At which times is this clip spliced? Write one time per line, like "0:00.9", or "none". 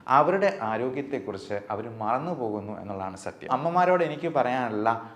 0:03.5